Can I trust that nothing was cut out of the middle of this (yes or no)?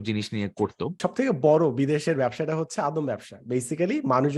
no